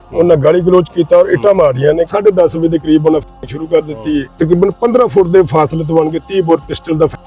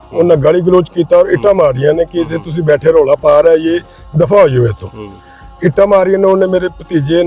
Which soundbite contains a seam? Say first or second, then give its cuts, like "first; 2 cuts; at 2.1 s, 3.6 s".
first; 2 cuts; at 2.1 s, 4.3 s